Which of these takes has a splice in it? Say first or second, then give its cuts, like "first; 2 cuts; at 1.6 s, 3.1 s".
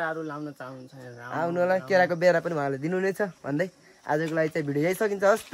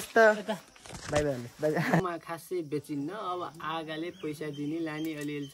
second; 1 cut; at 2.0 s